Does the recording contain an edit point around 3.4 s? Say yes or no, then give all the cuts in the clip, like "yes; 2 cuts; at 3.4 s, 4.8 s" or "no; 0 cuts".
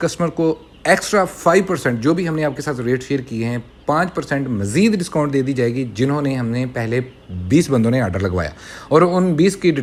no; 0 cuts